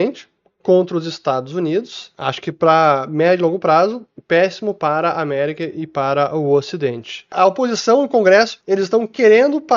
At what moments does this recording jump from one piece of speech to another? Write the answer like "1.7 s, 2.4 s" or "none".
2.0 s, 7.3 s, 8.6 s